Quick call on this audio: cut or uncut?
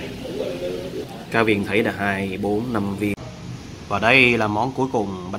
cut